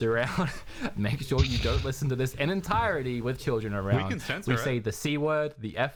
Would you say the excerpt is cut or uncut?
uncut